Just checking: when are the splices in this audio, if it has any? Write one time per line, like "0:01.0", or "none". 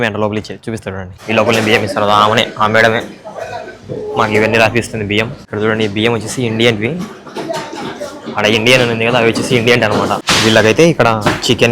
0:01.1
0:05.4
0:10.3